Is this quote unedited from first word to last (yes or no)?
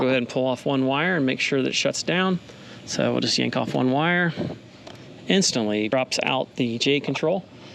yes